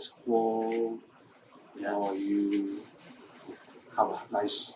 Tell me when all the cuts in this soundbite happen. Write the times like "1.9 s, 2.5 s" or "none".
none